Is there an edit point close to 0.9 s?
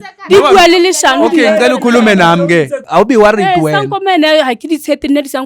no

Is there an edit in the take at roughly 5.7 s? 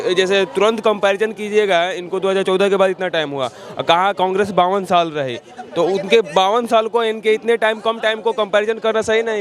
no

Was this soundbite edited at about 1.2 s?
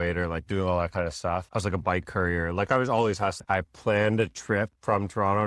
no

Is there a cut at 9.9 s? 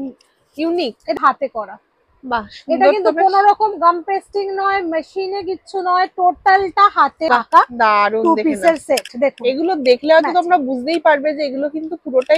no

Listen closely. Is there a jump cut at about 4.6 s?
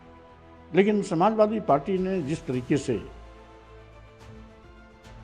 yes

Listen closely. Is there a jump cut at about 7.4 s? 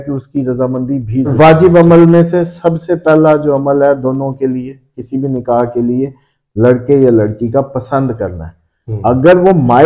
no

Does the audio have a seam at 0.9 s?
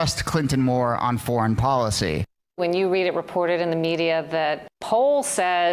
no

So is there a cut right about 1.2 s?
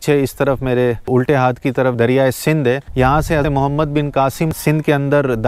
no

